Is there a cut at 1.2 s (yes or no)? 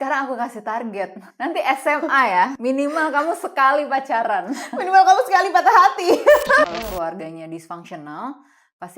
yes